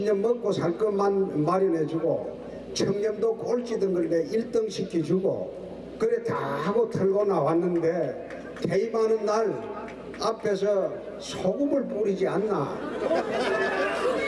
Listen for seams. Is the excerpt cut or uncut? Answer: cut